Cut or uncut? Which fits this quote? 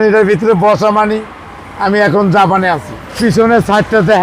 cut